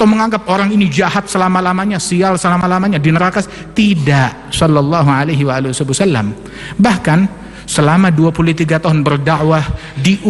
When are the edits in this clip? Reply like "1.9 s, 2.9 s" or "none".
none